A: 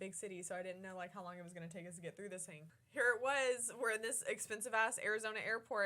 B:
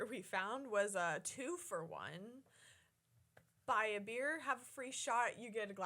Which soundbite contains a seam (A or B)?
A